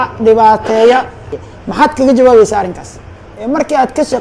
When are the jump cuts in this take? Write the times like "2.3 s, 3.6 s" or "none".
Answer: 1.3 s, 3.3 s